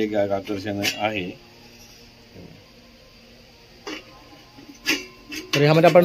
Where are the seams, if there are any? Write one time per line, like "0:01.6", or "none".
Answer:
none